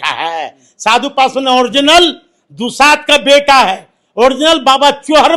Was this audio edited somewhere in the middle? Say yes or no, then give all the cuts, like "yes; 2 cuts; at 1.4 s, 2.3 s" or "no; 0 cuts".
no; 0 cuts